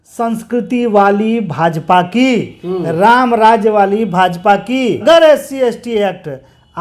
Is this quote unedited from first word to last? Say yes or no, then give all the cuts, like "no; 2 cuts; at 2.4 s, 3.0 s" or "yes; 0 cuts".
no; 1 cut; at 5.0 s